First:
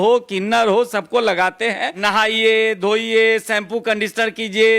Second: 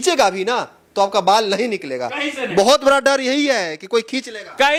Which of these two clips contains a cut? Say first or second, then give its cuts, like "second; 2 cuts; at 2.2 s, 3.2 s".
first; 1 cut; at 1.9 s